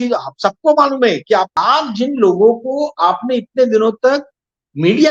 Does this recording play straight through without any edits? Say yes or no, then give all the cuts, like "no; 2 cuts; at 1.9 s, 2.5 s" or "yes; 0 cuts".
no; 1 cut; at 1.5 s